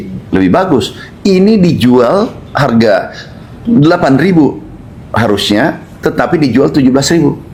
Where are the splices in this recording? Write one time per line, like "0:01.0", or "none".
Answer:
none

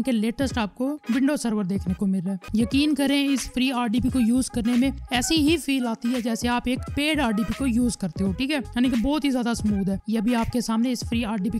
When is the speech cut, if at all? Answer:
0:02.5
0:10.0

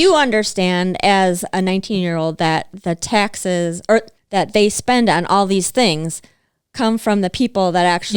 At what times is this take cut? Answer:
0:04.2

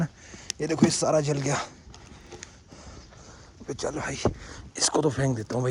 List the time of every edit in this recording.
none

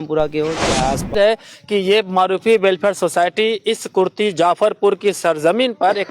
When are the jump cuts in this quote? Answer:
0:01.1

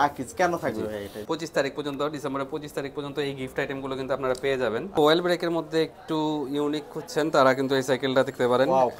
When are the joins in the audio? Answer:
0:01.1
0:05.0

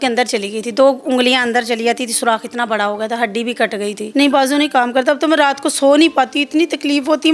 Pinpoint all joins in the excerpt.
0:04.0

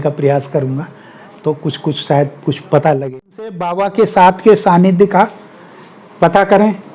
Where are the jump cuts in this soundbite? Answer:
0:03.8

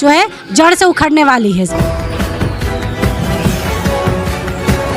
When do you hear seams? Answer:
0:01.7

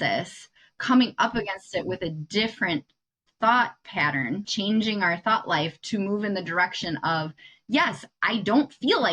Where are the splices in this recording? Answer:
0:04.4

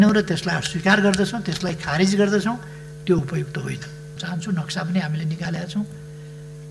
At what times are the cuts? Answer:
0:04.2

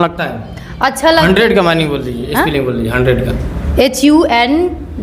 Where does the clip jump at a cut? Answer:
0:01.2

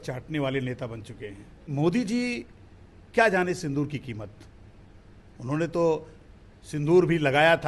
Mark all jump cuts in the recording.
0:01.7

